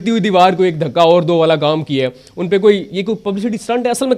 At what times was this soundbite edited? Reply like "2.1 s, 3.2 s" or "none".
none